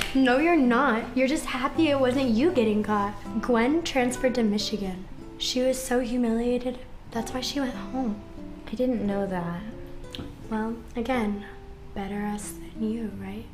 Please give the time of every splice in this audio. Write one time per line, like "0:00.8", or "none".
0:08.4